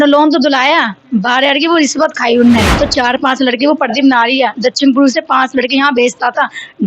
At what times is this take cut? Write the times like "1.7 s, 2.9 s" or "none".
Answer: 2.7 s